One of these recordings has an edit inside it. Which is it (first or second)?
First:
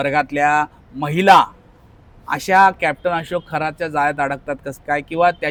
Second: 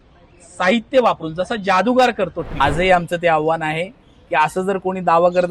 second